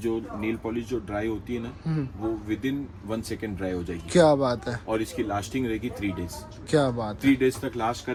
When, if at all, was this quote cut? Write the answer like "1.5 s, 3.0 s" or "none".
none